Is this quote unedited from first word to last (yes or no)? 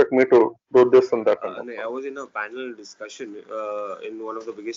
no